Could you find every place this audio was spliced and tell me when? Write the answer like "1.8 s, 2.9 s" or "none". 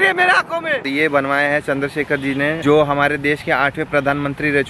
0.8 s, 2.6 s